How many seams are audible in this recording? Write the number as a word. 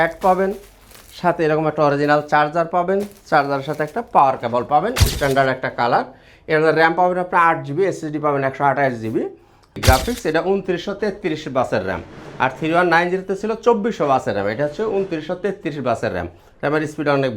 two